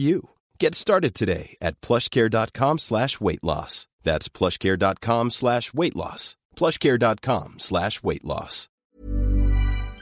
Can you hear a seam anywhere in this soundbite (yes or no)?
yes